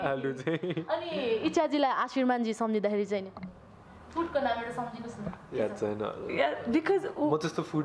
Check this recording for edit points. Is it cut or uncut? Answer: uncut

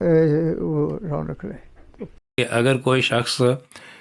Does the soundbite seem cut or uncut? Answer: cut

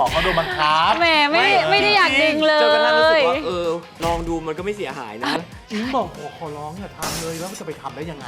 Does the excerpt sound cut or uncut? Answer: cut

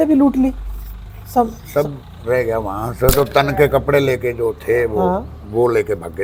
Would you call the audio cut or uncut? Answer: uncut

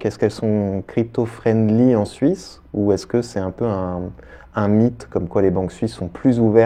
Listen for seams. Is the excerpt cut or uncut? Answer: uncut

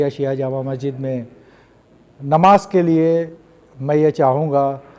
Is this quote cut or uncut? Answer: uncut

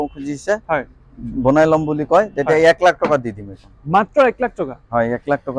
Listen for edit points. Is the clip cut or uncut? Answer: uncut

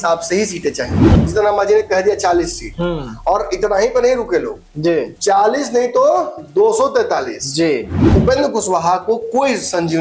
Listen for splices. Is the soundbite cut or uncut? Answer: cut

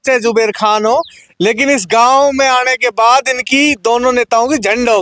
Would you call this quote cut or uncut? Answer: uncut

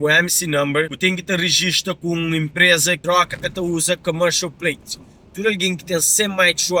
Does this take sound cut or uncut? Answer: cut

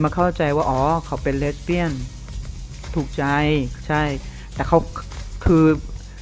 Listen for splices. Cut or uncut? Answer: uncut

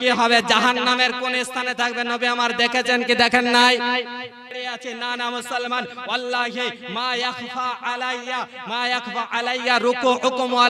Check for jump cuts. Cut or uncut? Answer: cut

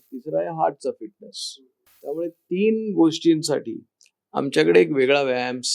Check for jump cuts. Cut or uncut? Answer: cut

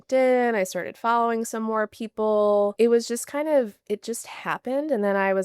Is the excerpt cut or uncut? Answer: cut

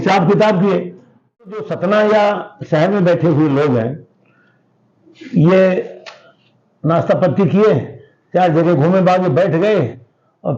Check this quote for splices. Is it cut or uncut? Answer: cut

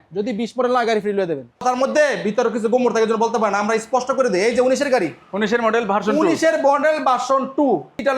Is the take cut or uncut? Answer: cut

